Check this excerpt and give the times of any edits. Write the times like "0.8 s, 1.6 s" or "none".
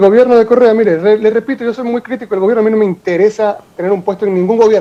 none